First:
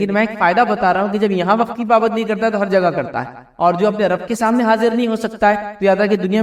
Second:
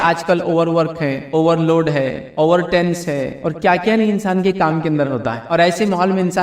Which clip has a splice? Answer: second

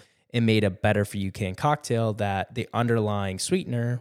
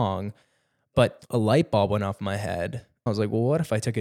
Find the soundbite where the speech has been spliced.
second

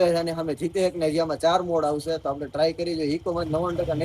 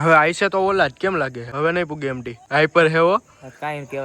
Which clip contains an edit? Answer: second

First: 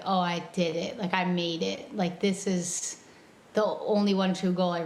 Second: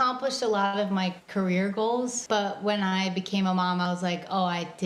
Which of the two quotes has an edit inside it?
second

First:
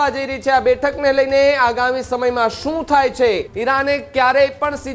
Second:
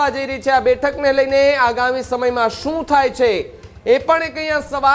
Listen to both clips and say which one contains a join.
first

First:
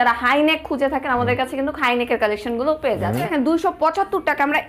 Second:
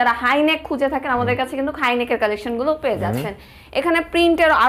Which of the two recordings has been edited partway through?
first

